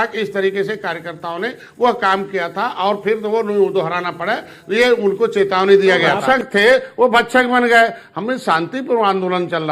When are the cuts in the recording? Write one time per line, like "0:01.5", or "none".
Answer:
0:06.2

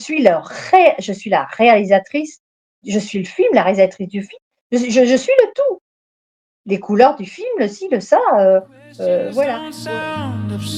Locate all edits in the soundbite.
0:09.7

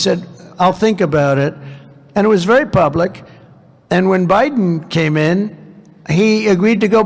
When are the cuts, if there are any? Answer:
none

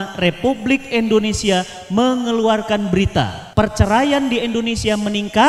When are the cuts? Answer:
0:03.4

